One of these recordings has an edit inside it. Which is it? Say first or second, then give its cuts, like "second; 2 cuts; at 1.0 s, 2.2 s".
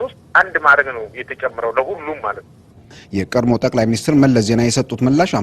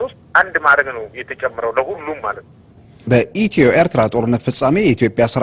first; 1 cut; at 3.0 s